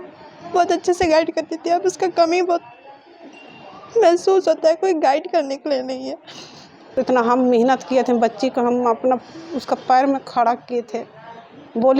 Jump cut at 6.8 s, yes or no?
yes